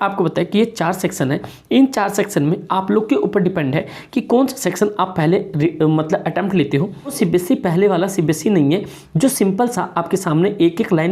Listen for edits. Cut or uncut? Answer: cut